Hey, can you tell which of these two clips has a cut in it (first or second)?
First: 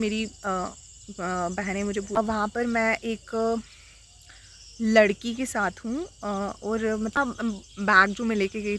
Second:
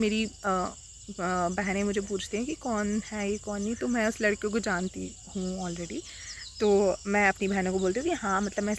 first